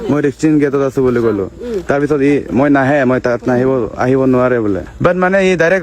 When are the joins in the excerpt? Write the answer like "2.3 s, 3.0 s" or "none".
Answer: 4.9 s